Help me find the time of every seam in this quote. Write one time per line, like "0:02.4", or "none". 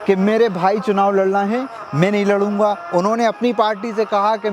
none